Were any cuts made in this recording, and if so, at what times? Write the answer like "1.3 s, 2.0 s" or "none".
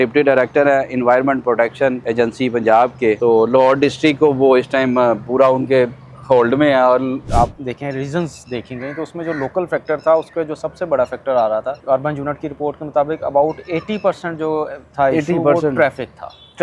2.0 s, 3.2 s, 7.2 s, 11.8 s